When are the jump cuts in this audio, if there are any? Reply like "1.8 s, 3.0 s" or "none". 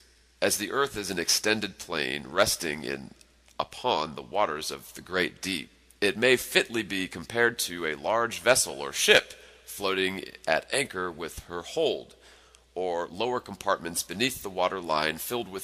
none